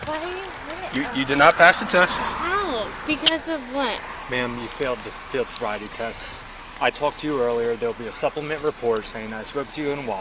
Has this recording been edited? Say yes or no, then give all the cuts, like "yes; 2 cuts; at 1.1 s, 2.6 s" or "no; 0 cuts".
no; 0 cuts